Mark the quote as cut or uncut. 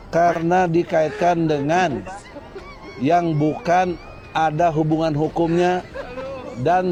uncut